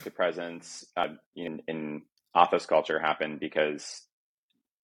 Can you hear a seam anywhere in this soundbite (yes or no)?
yes